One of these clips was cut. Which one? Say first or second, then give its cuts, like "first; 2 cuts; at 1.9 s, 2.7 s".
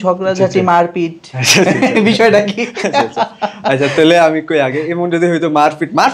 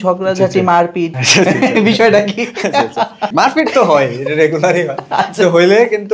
second; 2 cuts; at 1.2 s, 3.3 s